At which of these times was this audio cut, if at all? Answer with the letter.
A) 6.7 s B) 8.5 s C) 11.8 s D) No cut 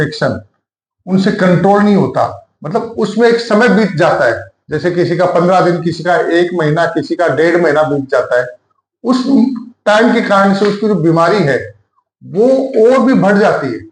D